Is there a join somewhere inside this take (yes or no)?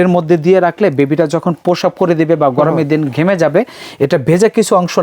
no